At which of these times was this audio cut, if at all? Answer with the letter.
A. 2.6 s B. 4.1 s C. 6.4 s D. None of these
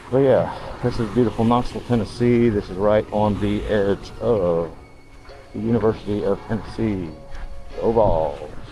D